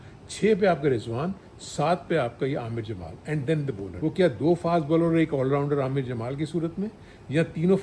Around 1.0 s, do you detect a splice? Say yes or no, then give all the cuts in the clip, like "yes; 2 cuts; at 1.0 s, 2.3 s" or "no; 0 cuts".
no; 1 cut; at 3.9 s